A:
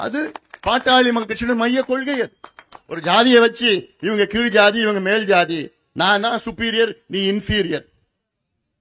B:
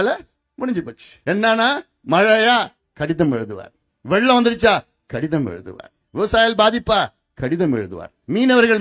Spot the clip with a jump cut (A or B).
B